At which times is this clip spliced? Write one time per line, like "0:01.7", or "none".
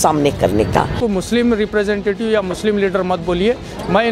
0:01.0